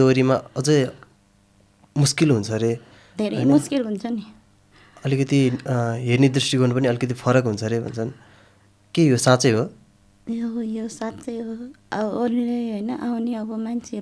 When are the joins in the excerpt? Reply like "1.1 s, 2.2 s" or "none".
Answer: none